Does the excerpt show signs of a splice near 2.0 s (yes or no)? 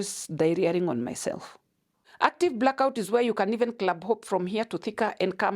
yes